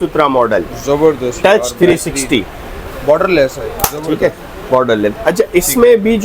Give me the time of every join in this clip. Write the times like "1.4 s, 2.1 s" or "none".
none